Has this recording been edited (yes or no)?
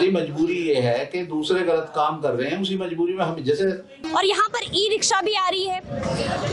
yes